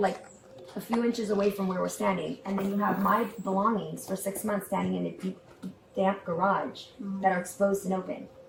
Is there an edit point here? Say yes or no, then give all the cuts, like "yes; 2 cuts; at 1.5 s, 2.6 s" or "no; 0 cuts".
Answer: no; 0 cuts